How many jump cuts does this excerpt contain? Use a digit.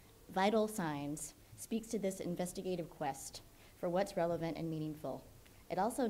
1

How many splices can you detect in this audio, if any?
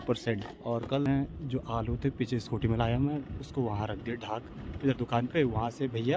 1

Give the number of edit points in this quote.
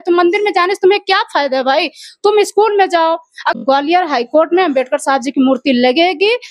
1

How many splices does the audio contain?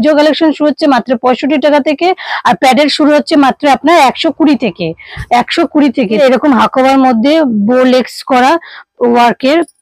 1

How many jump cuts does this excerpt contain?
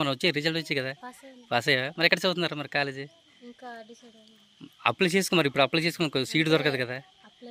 0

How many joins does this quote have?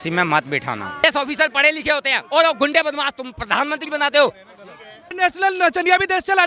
2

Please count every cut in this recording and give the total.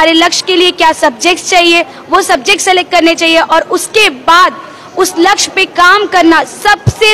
0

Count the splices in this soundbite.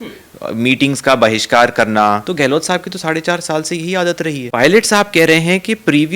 2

